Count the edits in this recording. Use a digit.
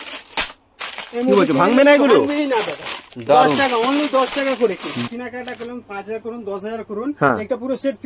1